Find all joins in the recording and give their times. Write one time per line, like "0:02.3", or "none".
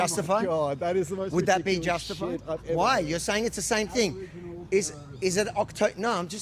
none